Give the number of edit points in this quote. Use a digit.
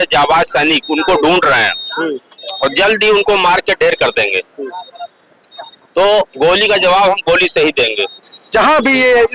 1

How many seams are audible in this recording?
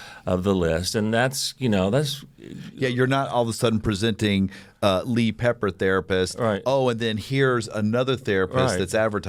0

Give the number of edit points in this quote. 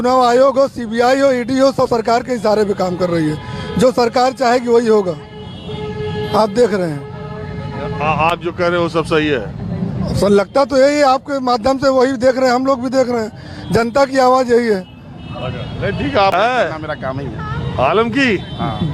1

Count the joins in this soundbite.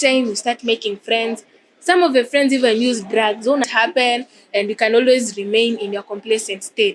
1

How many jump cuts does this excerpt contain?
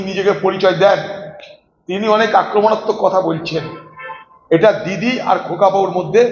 0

